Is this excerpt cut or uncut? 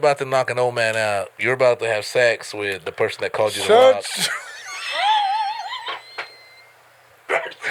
uncut